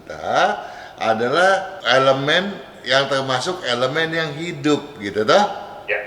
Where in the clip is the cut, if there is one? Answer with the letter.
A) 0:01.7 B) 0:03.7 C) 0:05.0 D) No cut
A